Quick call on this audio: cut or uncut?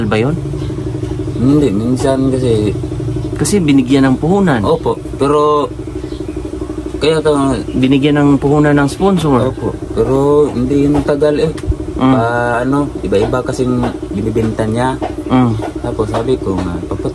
uncut